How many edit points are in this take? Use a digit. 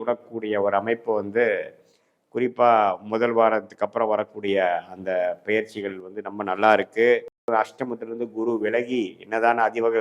1